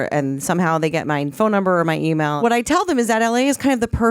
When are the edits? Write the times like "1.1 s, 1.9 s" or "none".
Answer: 2.4 s